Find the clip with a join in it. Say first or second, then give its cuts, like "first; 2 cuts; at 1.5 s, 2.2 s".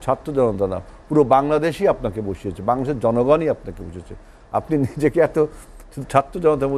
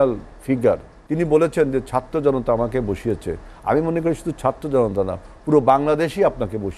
second; 1 cut; at 1.0 s